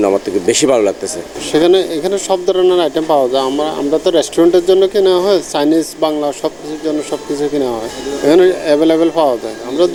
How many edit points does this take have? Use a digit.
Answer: 0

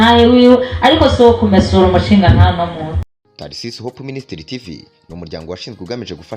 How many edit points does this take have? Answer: 1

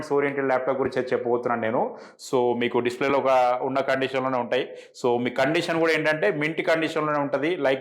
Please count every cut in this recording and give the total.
1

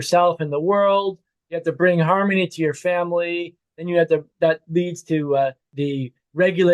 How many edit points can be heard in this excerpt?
1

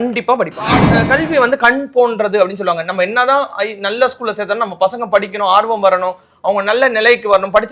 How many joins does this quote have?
1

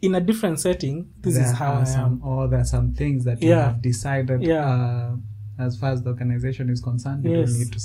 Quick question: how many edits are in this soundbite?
0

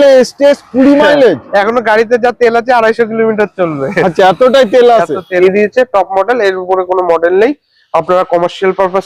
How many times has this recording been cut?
1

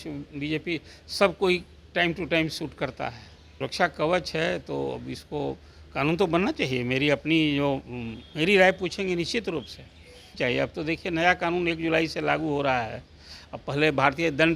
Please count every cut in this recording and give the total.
2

